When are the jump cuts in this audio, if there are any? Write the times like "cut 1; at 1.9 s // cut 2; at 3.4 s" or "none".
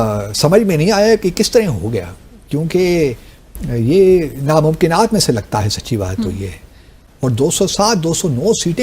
cut 1; at 7.1 s